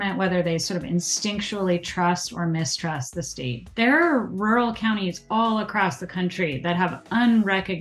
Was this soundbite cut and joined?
yes; 1 cut; at 3.6 s

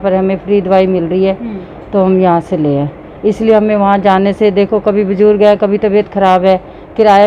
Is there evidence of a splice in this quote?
no; 0 cuts

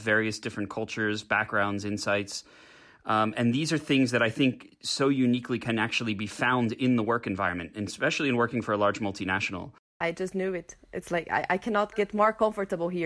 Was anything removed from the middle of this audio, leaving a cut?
yes; 1 cut; at 10.0 s

